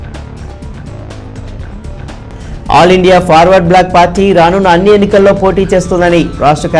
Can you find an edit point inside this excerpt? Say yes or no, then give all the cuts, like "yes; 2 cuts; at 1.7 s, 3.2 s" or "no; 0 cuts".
yes; 2 cuts; at 1.5 s, 2.5 s